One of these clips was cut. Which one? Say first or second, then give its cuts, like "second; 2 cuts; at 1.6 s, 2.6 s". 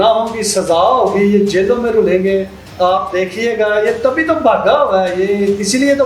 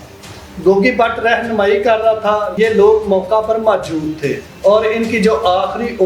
second; 2 cuts; at 2.5 s, 4.5 s